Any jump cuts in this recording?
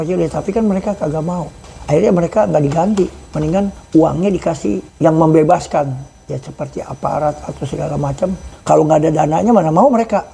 yes; 4 cuts; at 1.6 s, 3.8 s, 4.9 s, 8.5 s

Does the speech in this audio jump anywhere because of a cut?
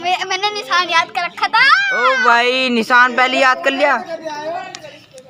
no; 0 cuts

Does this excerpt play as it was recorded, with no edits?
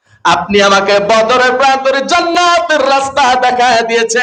yes; 0 cuts

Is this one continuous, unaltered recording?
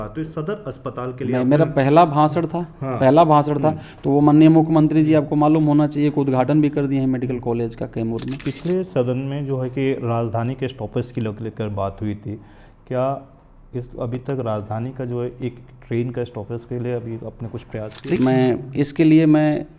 no; 2 cuts; at 8.4 s, 18.2 s

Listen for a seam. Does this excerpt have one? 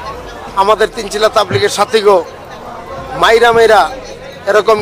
no; 0 cuts

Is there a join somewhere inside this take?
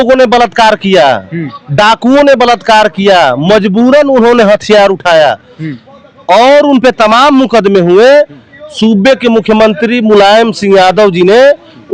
no; 0 cuts

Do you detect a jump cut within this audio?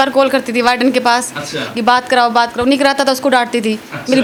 no; 0 cuts

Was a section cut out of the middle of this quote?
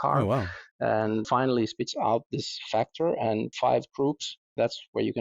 yes; 2 cuts; at 1.3 s, 3.5 s

